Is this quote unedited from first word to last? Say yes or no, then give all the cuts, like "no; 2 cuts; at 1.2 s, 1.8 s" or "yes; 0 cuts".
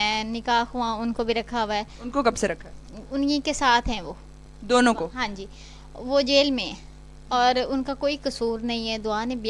yes; 0 cuts